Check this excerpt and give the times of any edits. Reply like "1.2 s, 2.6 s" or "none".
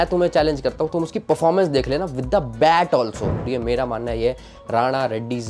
3.5 s